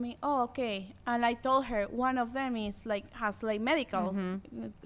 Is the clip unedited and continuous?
yes; 0 cuts

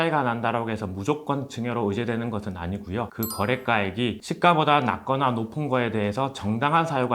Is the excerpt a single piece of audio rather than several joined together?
yes; 0 cuts

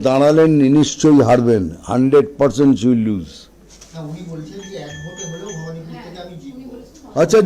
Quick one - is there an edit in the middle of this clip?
no; 0 cuts

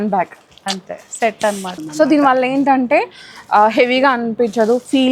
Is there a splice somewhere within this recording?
yes; 1 cut; at 1.7 s

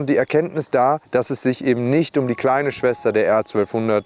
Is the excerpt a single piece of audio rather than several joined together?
no; 1 cut; at 1.0 s

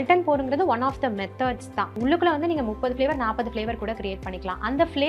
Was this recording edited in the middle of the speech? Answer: yes; 1 cut; at 1.9 s

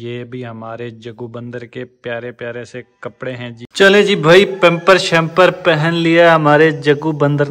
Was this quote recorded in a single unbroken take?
no; 1 cut; at 3.6 s

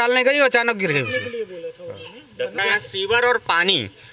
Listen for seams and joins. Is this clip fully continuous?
no; 1 cut; at 2.5 s

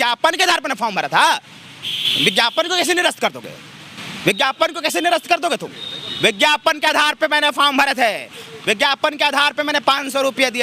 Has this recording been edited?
no; 0 cuts

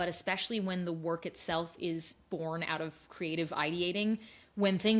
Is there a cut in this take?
no; 0 cuts

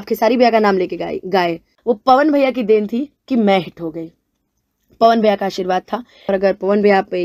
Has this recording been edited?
yes; 2 cuts; at 1.7 s, 6.3 s

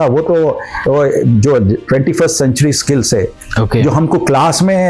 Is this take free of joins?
yes; 0 cuts

